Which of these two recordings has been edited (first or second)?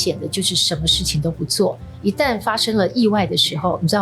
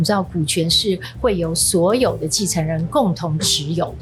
first